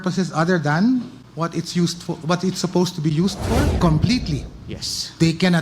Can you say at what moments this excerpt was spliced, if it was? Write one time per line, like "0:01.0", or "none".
0:01.2
0:03.8